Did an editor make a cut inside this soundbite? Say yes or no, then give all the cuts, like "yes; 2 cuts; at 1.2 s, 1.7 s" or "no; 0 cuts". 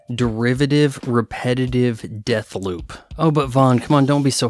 no; 0 cuts